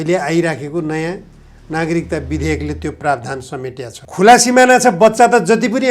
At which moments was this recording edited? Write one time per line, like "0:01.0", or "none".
0:03.9